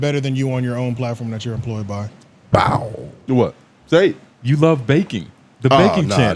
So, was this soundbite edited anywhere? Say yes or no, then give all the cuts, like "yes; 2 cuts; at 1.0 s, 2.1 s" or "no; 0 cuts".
yes; 1 cut; at 3.1 s